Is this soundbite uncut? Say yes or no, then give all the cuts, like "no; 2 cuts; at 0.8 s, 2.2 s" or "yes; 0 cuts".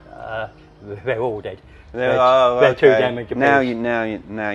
yes; 0 cuts